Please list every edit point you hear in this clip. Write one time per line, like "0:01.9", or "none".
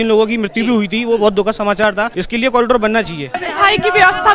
0:02.1
0:03.4